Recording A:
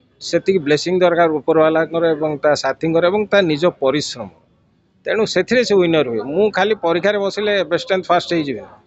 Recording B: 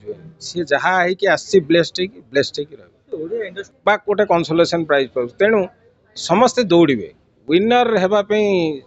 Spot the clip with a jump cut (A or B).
B